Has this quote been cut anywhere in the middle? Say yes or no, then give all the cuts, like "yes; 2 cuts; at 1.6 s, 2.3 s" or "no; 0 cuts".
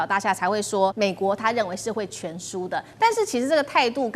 yes; 1 cut; at 0.9 s